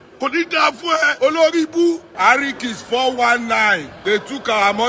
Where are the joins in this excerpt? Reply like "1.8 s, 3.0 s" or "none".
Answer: 1.1 s